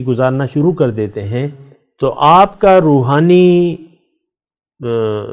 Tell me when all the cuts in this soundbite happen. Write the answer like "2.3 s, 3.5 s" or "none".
none